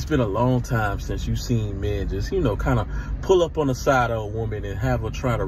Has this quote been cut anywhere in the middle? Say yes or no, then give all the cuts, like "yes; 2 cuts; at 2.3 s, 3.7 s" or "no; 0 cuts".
no; 0 cuts